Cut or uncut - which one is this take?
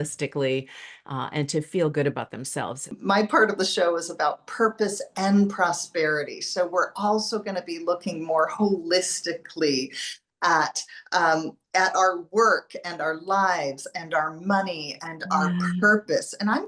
cut